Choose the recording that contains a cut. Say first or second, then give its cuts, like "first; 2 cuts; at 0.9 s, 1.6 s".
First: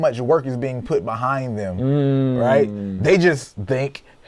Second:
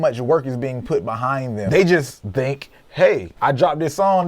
second; 2 cuts; at 1.6 s, 3.3 s